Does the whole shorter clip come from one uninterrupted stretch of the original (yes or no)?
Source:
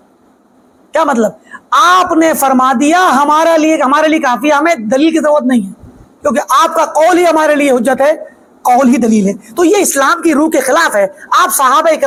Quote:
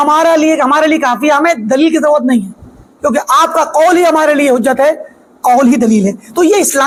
yes